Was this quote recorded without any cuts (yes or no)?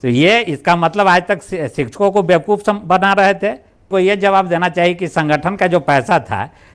no